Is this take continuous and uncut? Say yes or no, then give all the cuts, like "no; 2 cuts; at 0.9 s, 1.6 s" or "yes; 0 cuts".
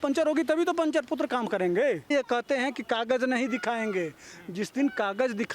no; 1 cut; at 2.1 s